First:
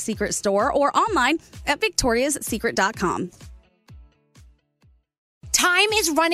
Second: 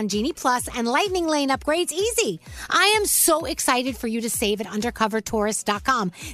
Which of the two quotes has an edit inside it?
first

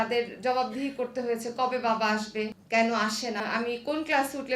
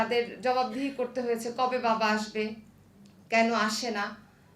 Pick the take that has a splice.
first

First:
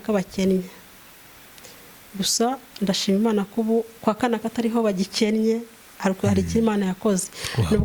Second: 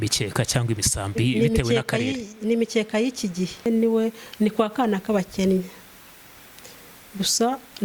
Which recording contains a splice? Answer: second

